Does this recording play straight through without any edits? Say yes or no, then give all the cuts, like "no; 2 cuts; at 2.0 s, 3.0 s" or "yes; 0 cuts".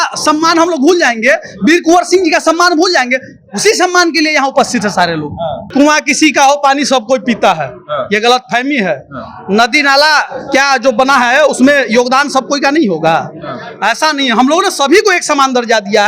no; 1 cut; at 5.6 s